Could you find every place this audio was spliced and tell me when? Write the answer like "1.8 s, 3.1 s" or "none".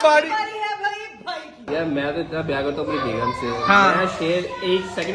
none